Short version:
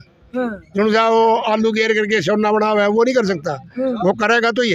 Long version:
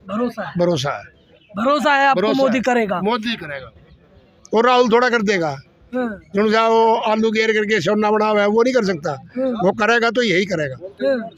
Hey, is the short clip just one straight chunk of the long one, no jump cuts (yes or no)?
yes